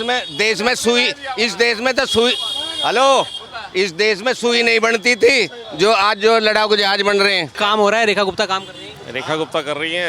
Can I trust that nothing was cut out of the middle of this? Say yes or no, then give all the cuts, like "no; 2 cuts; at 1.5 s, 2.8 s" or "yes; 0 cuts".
no; 1 cut; at 7.5 s